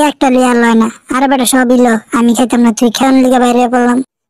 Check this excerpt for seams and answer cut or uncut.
cut